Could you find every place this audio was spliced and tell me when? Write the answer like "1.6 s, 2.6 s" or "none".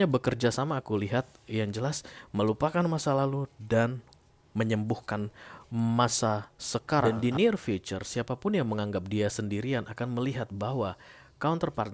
7.0 s